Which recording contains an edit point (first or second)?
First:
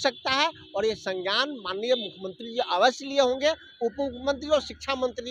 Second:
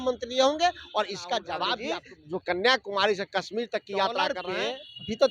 second